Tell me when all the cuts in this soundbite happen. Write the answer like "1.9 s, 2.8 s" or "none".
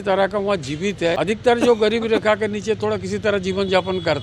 1.2 s